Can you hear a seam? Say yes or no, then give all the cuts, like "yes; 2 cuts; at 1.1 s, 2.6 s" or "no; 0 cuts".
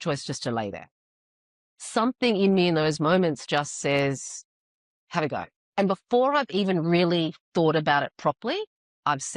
yes; 1 cut; at 5.6 s